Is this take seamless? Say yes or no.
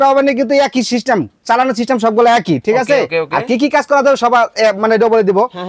yes